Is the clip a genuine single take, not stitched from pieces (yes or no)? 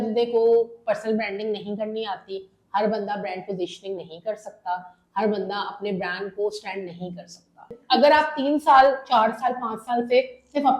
no